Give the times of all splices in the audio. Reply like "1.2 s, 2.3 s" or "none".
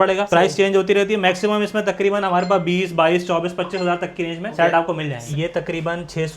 4.5 s, 5.3 s